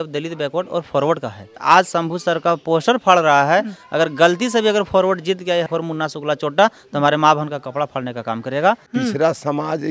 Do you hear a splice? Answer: yes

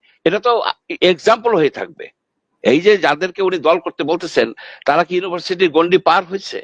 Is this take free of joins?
yes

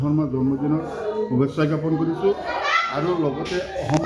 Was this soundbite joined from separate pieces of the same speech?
no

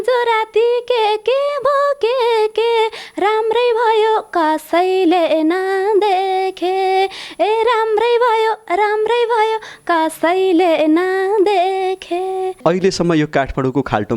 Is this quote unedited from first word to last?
no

